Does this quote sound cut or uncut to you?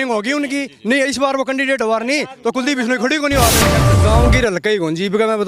cut